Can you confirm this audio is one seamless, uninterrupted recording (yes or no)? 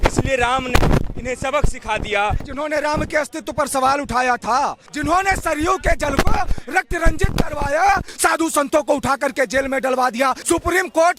no